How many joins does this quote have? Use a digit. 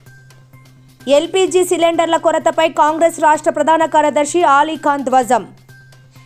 2